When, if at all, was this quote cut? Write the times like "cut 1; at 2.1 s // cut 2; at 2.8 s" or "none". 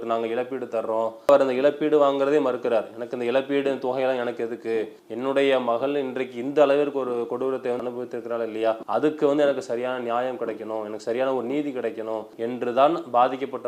cut 1; at 1.3 s // cut 2; at 5.0 s // cut 3; at 12.3 s